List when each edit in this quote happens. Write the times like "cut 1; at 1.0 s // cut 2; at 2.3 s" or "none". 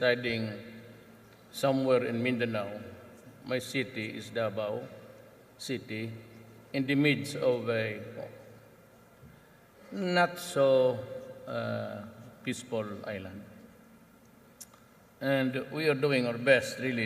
cut 1; at 10.8 s